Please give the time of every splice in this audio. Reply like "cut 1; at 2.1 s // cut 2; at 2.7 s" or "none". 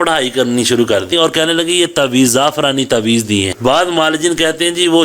cut 1; at 1.1 s // cut 2; at 3.5 s